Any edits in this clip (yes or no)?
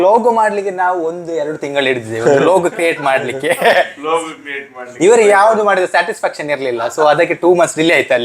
no